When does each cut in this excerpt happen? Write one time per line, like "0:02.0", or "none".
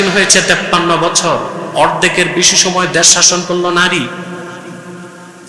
none